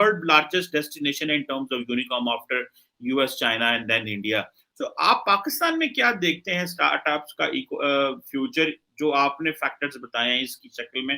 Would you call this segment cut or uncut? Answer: uncut